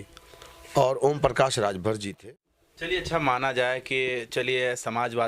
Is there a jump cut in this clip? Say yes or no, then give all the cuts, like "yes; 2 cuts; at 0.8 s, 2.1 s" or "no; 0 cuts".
yes; 1 cut; at 2.2 s